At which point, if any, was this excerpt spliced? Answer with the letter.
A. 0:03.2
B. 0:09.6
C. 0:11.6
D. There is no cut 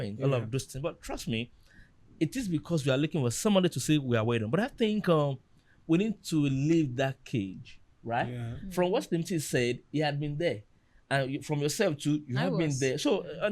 D